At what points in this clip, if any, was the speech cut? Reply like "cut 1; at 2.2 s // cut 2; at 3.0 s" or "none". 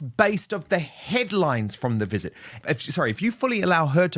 cut 1; at 2.6 s